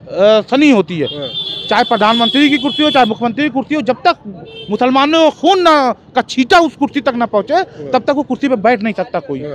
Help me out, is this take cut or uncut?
uncut